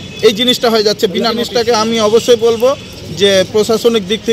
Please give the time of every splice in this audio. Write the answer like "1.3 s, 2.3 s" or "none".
1.4 s